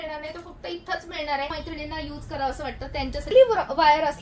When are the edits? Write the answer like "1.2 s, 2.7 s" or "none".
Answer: 1.5 s, 3.3 s

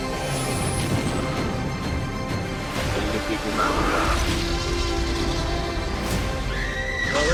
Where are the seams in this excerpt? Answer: none

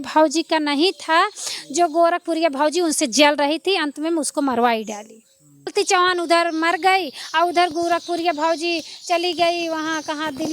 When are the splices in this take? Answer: 5.7 s

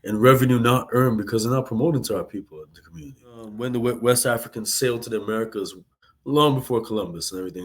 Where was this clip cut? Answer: 3.6 s

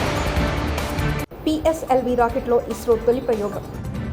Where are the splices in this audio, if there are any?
1.2 s

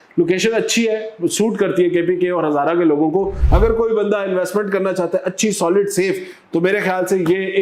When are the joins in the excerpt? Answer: 3.4 s

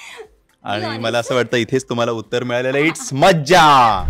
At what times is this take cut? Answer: none

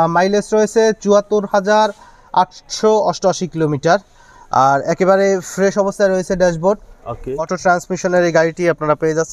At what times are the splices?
7.5 s

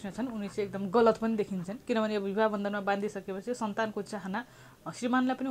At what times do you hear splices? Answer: none

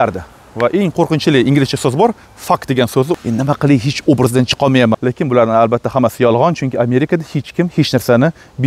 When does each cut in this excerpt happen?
3.1 s, 5.0 s

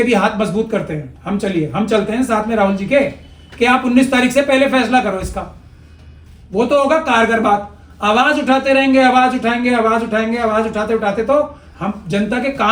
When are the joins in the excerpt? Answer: none

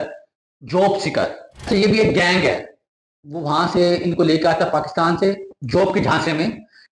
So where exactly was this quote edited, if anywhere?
1.5 s

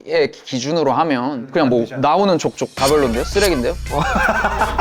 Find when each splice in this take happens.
none

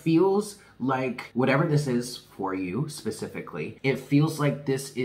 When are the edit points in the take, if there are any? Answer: 1.2 s, 3.7 s

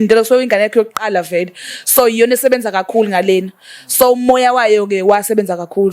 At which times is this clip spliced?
none

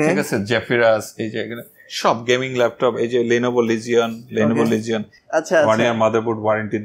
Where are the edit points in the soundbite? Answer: 5.1 s

